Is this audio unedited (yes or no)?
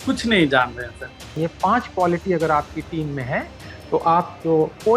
no